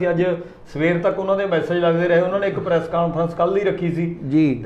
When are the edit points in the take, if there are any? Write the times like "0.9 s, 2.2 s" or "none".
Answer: none